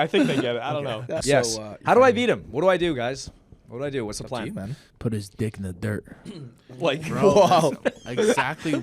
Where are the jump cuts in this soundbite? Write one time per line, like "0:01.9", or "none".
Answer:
0:01.1